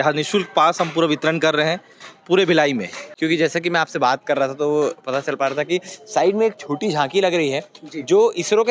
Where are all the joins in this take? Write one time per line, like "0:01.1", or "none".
0:03.0